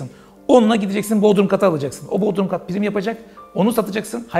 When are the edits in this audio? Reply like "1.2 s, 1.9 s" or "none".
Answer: none